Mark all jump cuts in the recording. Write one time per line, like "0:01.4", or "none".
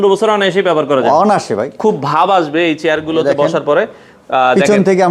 0:01.8